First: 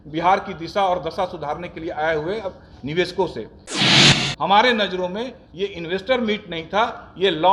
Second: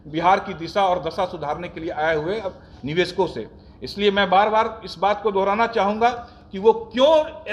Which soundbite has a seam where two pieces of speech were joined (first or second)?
first